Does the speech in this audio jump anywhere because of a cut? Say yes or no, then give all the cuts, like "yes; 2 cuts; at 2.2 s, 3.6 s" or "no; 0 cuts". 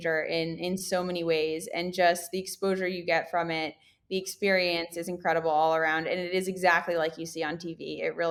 no; 0 cuts